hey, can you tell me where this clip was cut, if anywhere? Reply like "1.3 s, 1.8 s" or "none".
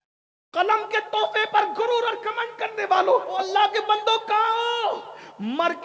3.4 s

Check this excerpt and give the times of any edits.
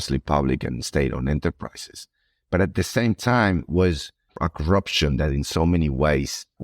4.3 s

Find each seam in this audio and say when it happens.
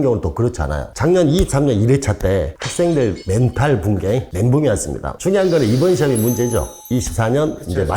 5.1 s

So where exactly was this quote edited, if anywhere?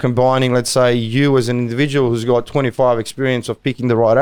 none

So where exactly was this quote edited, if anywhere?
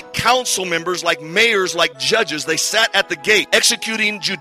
3.5 s

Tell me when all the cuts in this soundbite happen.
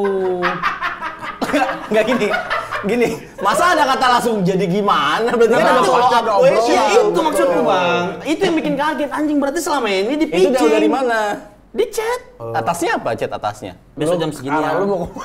12.4 s, 13.8 s

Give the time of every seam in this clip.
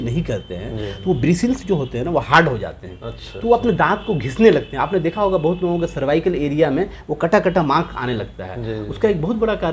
none

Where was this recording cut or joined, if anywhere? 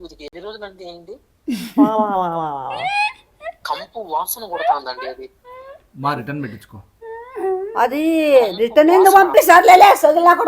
1.2 s, 3.3 s

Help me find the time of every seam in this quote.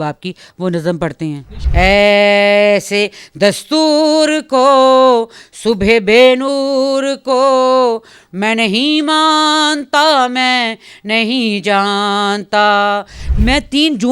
1.6 s, 13.2 s

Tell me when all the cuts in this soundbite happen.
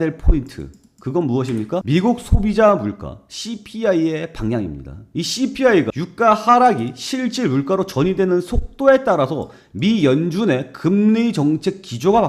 none

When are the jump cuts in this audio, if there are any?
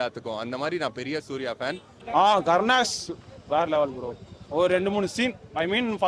1.9 s

